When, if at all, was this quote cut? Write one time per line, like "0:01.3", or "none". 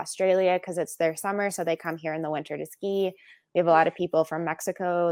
none